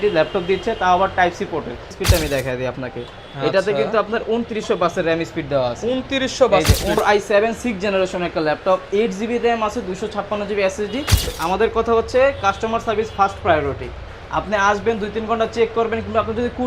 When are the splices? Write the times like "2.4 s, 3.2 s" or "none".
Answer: 1.9 s, 7.0 s, 11.3 s